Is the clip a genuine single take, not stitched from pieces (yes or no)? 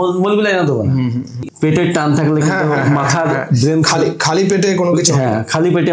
no